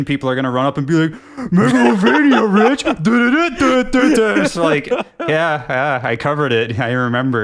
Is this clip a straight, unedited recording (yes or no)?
yes